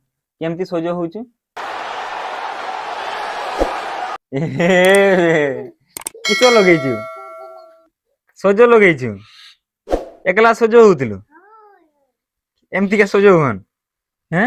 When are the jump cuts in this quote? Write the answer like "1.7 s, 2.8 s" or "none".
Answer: none